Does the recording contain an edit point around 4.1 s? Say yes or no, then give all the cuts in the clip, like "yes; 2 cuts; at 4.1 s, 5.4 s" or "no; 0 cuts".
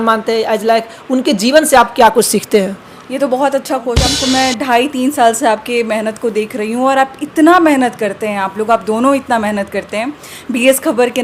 yes; 1 cut; at 4.1 s